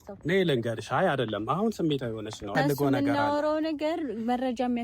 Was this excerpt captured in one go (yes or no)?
no